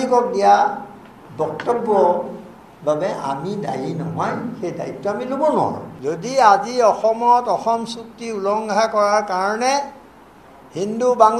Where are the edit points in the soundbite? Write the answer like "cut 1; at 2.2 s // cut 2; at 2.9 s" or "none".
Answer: cut 1; at 5.9 s